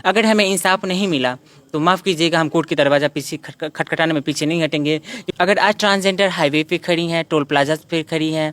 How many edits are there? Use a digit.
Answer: 1